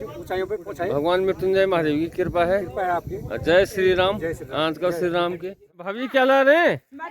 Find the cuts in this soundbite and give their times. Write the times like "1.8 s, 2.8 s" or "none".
5.9 s